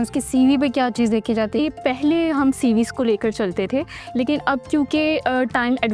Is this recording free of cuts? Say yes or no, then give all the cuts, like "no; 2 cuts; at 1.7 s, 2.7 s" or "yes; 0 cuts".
no; 1 cut; at 1.6 s